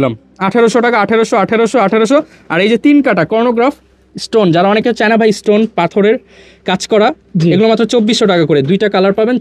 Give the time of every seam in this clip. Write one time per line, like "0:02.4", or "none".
none